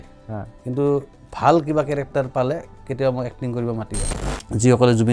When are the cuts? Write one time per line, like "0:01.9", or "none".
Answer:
0:04.0